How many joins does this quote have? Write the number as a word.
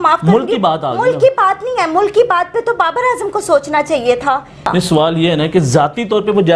one